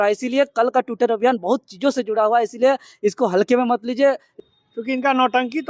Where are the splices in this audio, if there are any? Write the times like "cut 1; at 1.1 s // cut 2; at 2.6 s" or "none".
cut 1; at 4.3 s

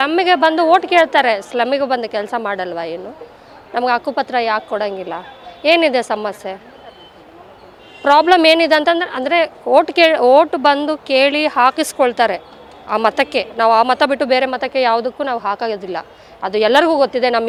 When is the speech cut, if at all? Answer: none

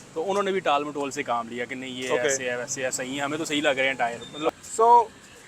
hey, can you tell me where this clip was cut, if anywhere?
cut 1; at 4.5 s

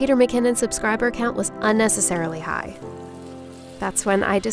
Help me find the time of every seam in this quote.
none

